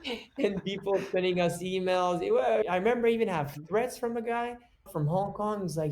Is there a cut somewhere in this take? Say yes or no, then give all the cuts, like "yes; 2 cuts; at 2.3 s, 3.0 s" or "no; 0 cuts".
yes; 2 cuts; at 2.7 s, 4.9 s